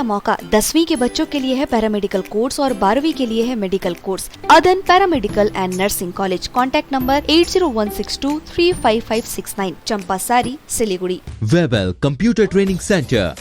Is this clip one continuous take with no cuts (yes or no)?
no